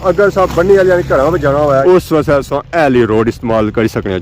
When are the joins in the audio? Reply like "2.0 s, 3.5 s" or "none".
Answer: 1.8 s